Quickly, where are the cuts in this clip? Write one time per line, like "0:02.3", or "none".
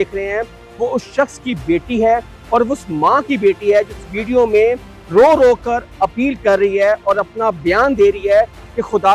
none